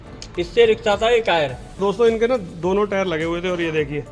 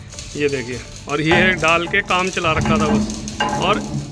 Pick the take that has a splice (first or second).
first